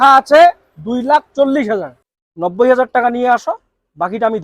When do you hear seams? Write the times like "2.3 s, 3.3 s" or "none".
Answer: 2.0 s